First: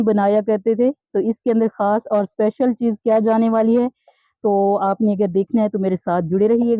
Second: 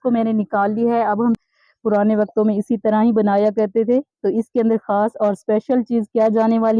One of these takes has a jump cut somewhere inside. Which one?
second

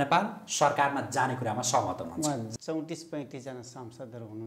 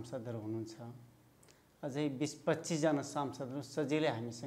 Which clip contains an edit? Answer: first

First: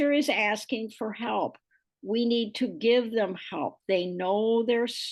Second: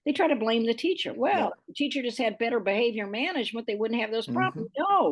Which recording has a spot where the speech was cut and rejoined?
second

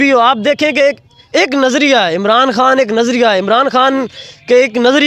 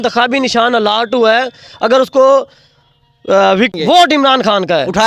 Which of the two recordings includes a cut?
second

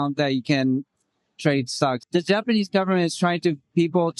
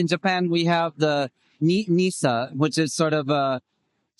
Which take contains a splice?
first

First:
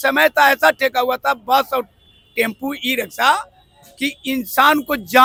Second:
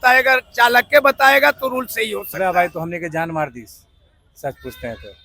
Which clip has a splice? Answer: second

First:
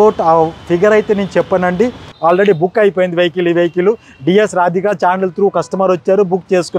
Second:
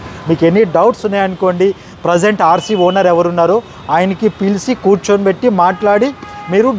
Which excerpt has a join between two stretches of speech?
first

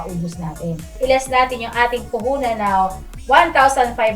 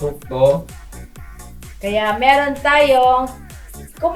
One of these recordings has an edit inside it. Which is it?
first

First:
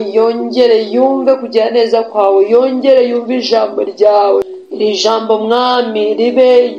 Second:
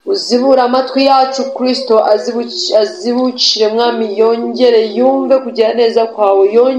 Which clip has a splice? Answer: first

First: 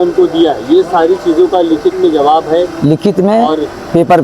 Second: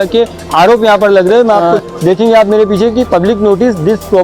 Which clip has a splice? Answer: second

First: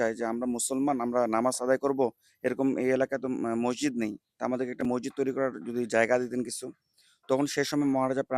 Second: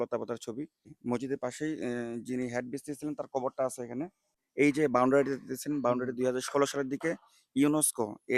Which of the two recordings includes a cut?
second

